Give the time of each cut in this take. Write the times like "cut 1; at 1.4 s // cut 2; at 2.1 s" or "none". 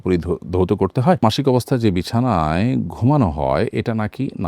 cut 1; at 1.2 s